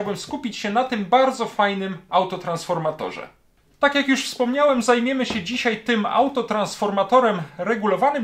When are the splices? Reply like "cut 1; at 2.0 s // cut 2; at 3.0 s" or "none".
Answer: none

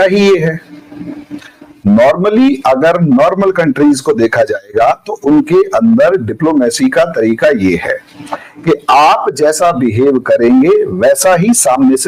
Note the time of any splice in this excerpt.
none

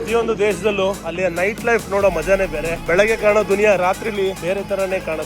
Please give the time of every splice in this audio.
cut 1; at 1.1 s // cut 2; at 2.8 s // cut 3; at 4.4 s

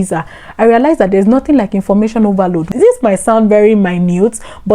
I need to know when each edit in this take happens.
cut 1; at 2.7 s

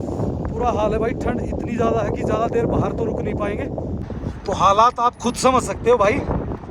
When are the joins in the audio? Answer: cut 1; at 4.0 s

